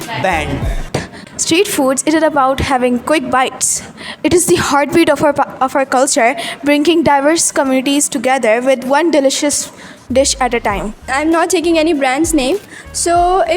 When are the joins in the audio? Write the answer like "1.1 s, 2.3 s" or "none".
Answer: 1.0 s, 11.0 s